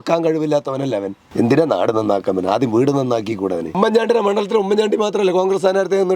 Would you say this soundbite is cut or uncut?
cut